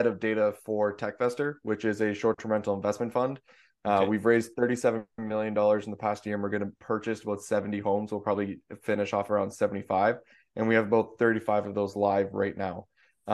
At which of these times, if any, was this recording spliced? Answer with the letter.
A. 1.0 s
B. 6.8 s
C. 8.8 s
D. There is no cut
B